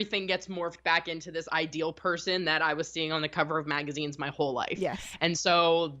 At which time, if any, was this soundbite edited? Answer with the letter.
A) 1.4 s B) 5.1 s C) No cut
C